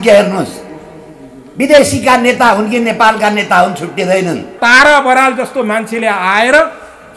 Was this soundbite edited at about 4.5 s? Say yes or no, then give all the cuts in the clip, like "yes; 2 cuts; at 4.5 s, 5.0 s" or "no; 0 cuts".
yes; 1 cut; at 4.5 s